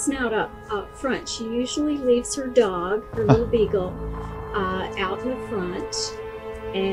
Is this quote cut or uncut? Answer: uncut